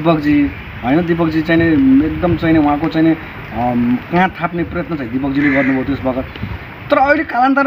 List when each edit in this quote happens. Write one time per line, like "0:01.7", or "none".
none